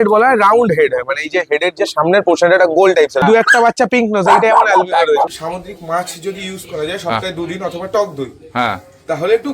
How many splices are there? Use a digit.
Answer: 2